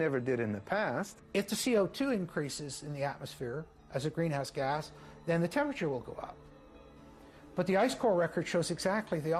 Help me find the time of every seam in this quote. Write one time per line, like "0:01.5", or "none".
0:01.2